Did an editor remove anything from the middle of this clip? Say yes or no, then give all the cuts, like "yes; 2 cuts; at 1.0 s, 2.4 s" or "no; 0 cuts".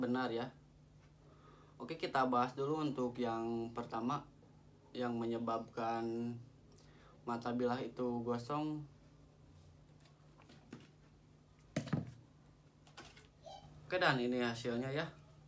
yes; 1 cut; at 13.9 s